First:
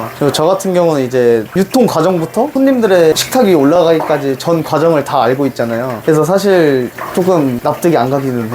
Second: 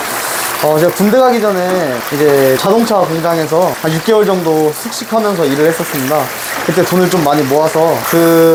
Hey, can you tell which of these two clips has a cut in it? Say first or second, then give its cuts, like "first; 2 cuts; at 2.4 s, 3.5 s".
first; 3 cuts; at 3.2 s, 5.9 s, 7.6 s